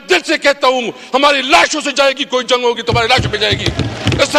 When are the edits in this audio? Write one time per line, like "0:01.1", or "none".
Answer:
none